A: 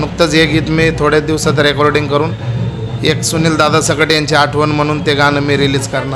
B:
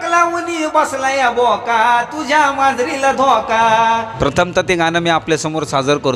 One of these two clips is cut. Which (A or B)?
B